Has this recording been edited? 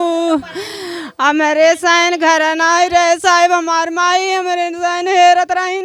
no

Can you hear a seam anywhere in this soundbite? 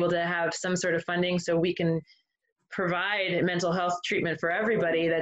no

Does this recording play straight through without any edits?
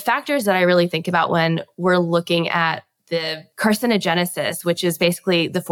no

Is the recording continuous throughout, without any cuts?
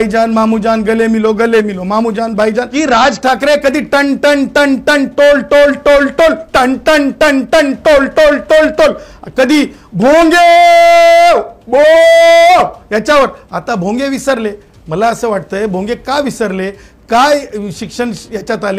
no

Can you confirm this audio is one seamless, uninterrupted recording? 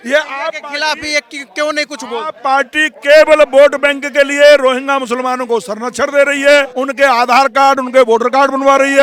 yes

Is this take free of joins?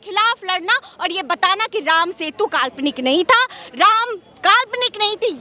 yes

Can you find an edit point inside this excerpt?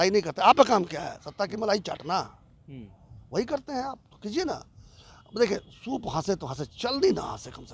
no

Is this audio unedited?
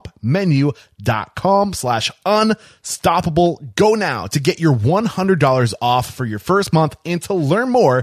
no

